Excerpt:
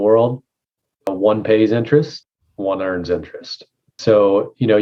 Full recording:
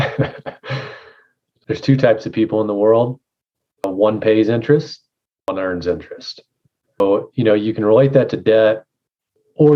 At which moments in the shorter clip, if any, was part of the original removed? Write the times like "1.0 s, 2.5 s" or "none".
none